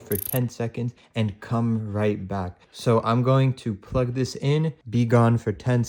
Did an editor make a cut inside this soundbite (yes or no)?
no